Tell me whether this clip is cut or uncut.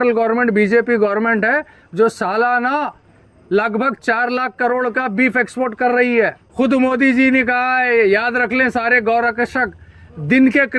cut